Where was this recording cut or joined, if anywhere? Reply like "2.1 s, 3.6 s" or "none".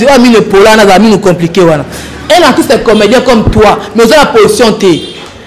none